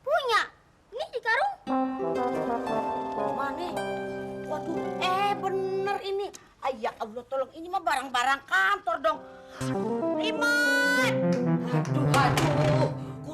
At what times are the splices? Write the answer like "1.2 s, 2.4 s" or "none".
11.4 s